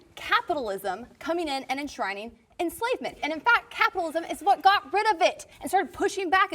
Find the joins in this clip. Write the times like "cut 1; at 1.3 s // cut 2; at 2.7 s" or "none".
cut 1; at 3.2 s // cut 2; at 5.5 s